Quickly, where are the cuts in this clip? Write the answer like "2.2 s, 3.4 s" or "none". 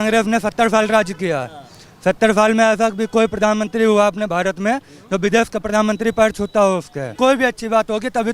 7.2 s